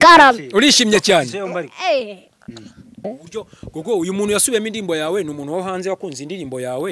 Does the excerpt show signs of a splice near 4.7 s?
no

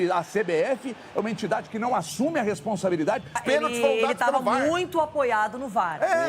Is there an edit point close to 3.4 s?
yes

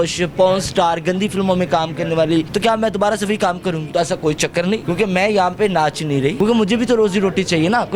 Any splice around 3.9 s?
yes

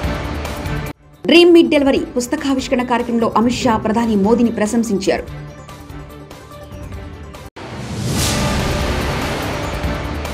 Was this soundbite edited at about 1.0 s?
no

